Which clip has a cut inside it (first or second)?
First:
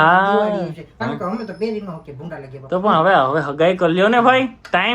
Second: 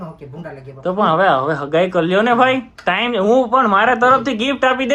first